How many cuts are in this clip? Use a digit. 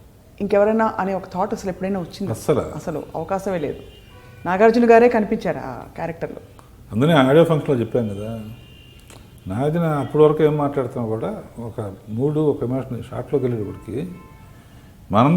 0